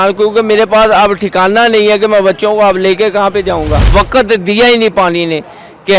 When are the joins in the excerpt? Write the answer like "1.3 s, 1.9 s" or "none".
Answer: 3.8 s